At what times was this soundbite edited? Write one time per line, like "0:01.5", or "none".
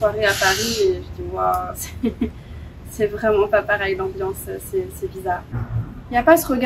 0:05.5

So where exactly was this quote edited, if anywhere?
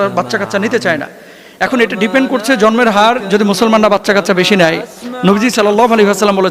none

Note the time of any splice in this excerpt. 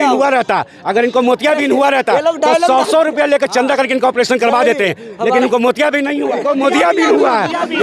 0:06.4

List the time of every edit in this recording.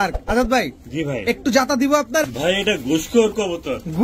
0:02.2

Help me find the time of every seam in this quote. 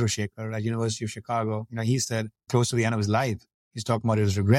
0:02.4

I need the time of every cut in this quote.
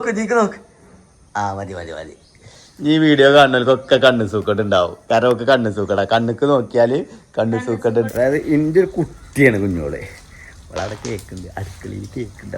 0:08.1

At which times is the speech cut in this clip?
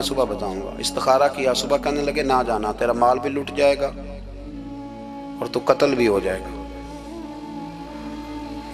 none

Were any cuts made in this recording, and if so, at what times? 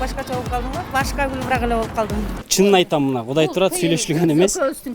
0:02.4

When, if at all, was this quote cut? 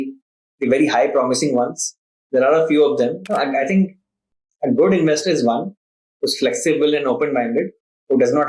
0:03.2

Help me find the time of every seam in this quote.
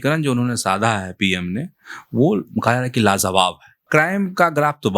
0:03.8

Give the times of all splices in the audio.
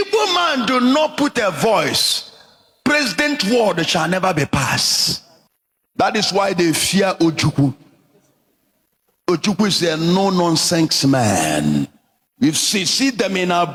none

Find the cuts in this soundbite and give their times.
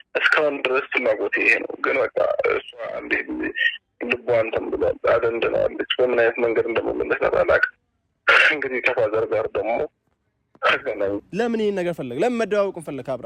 0:11.2

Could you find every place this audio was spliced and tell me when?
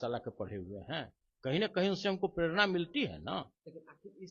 none

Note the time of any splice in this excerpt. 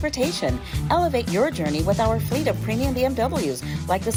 none

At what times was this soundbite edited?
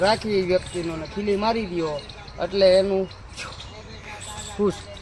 none

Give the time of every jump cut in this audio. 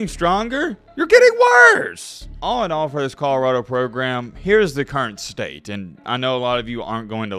0:02.3

